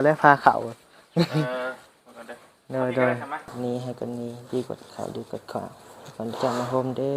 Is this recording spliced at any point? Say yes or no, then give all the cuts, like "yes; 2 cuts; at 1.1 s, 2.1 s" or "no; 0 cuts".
yes; 1 cut; at 3.5 s